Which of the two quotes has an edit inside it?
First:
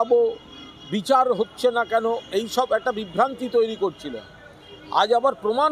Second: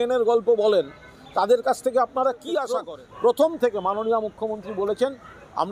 second; 1 cut; at 2.7 s

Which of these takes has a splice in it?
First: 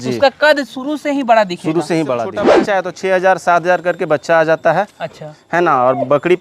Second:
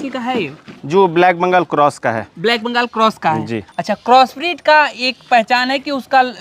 first; 1 cut; at 2.4 s

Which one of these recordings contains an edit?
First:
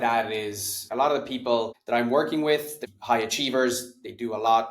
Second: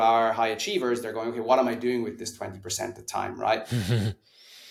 first; 3 cuts; at 0.9 s, 1.8 s, 2.7 s

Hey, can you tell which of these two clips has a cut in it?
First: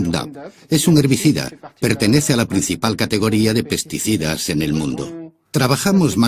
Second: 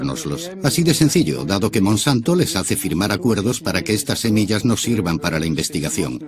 first; 1 cut; at 3.4 s

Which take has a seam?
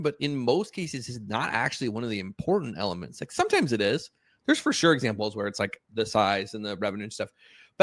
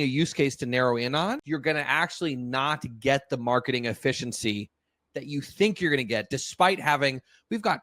second; 1 cut; at 1.4 s

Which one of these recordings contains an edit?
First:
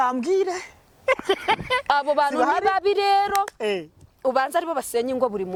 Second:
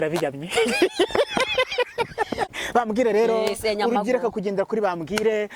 second; 1 cut; at 2.5 s

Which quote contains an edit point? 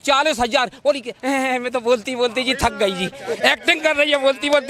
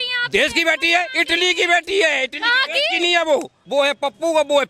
second; 1 cut; at 3.6 s

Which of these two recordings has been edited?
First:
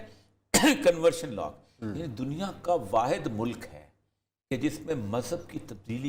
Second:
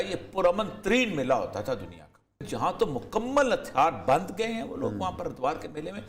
second; 1 cut; at 2.5 s

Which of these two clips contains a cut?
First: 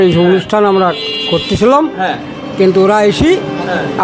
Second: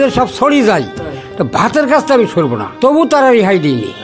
second; 1 cut; at 2.7 s

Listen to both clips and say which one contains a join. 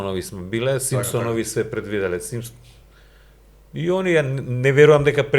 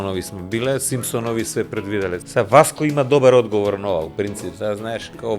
second; 1 cut; at 2.2 s

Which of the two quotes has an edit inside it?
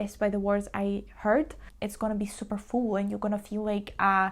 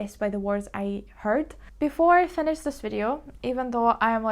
first; 1 cut; at 1.6 s

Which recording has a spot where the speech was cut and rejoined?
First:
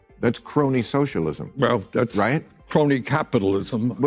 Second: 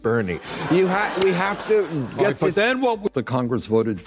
second; 1 cut; at 3.1 s

